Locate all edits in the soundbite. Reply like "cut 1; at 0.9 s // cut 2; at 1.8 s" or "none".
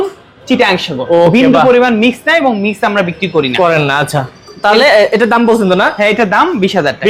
none